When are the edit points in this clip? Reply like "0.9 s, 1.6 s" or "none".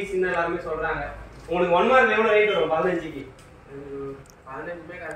none